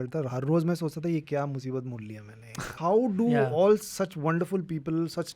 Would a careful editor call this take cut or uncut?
cut